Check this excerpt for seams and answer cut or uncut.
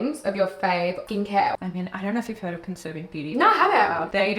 cut